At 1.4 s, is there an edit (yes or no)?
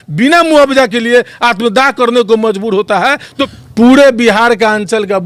no